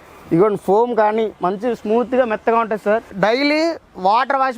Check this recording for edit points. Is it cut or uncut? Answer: cut